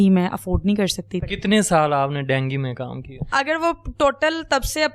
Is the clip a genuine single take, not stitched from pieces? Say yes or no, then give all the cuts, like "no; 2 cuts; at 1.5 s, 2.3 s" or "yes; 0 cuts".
no; 2 cuts; at 1.2 s, 3.3 s